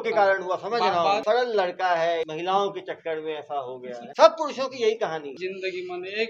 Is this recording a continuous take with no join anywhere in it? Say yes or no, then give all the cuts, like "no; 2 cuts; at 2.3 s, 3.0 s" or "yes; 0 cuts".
no; 4 cuts; at 1.2 s, 2.3 s, 4.0 s, 5.3 s